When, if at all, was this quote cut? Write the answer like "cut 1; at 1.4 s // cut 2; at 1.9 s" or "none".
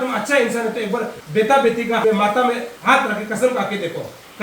cut 1; at 1.2 s // cut 2; at 2.0 s // cut 3; at 2.7 s